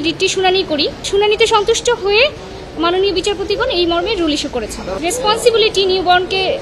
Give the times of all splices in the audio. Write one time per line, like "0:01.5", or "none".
0:01.0
0:04.9